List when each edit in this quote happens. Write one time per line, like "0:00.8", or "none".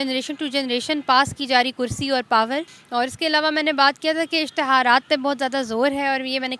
0:02.8